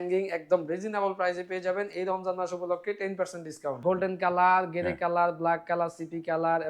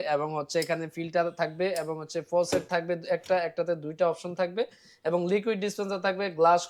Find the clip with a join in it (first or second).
first